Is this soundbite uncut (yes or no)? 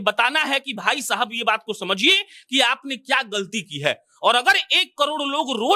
yes